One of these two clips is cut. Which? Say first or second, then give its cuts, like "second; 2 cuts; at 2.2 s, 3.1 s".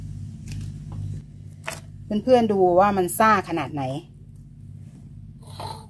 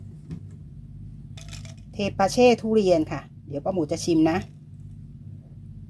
second; 1 cut; at 1.4 s